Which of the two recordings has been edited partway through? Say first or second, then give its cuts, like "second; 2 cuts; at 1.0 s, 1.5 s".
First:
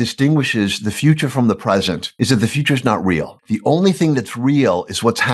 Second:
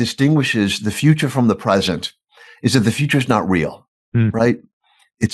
first; 2 cuts; at 2.1 s, 3.3 s